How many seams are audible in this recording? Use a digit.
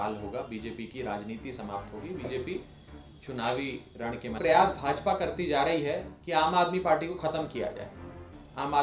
1